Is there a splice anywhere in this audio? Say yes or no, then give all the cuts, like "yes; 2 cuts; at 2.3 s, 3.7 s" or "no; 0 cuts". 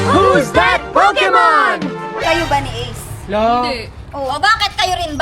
yes; 1 cut; at 2.2 s